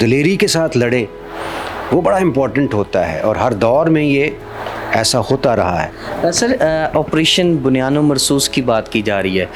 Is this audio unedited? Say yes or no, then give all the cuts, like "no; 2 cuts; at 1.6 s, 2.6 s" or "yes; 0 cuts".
yes; 0 cuts